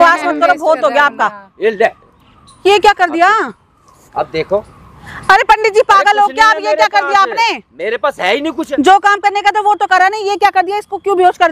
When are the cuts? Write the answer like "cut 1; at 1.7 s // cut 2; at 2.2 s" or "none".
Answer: none